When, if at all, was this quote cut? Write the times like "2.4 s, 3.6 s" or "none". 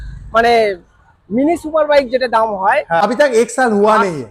3.0 s